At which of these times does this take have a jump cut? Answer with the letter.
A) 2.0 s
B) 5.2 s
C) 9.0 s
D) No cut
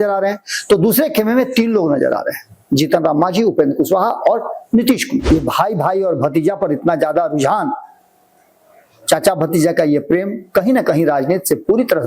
B